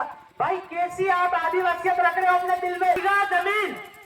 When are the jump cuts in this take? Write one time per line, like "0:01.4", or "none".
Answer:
0:03.0